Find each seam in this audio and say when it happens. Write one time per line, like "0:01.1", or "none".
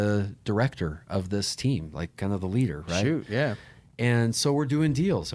none